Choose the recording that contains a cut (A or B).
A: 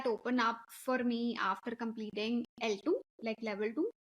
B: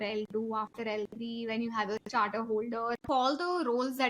B